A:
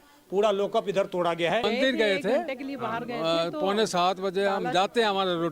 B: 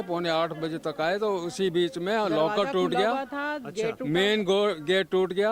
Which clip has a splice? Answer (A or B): A